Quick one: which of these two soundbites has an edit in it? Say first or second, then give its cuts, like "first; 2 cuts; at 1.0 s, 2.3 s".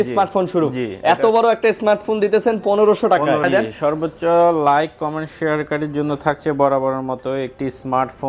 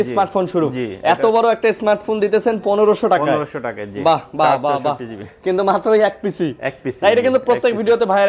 first; 1 cut; at 3.4 s